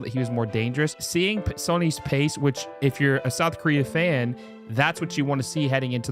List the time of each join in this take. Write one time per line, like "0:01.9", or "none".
0:01.0